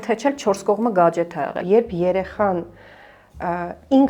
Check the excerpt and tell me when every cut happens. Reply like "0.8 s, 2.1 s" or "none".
1.6 s

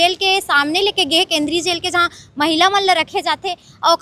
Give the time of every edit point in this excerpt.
none

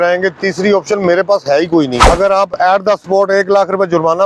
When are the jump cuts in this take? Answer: 2.0 s

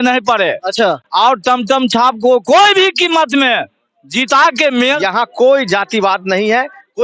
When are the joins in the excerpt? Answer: 5.0 s

